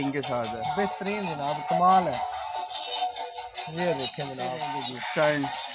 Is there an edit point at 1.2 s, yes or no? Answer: no